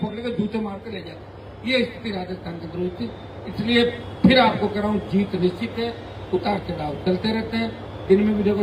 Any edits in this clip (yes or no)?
no